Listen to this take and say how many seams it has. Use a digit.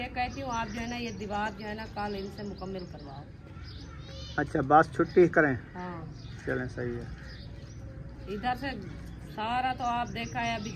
0